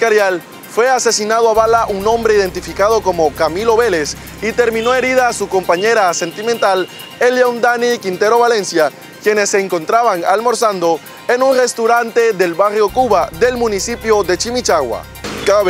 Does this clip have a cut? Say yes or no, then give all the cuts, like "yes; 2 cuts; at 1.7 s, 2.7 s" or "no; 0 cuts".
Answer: no; 0 cuts